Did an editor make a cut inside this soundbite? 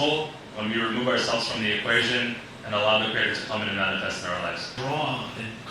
yes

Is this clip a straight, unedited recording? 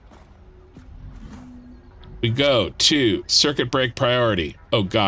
no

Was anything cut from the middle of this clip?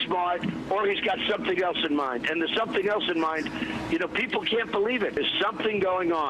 yes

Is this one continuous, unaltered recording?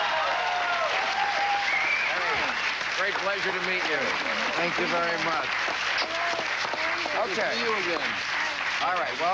no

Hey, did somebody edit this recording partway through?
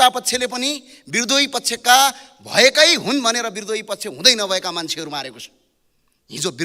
no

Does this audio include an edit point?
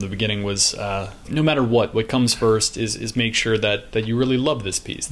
yes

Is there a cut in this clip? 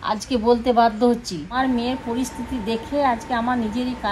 yes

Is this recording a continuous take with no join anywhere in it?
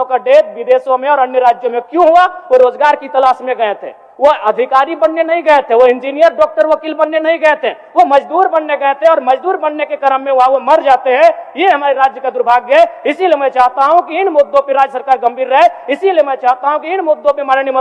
yes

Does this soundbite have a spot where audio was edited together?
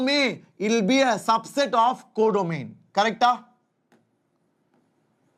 no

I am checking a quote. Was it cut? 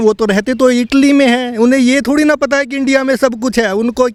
no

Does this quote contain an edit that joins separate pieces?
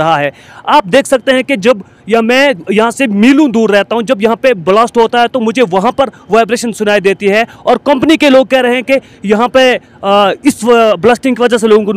no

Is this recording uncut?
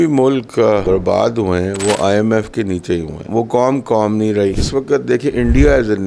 no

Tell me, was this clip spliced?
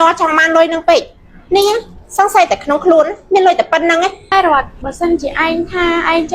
yes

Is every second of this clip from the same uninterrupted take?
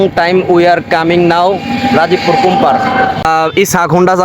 no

